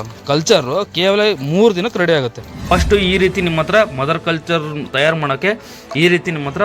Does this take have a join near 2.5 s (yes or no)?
yes